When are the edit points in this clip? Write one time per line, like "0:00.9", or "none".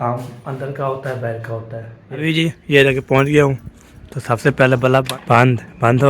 0:02.1
0:05.1